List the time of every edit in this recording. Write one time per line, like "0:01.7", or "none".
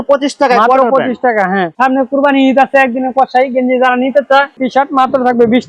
0:01.7
0:04.5